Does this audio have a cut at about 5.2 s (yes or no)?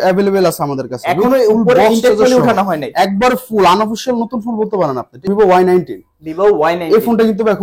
yes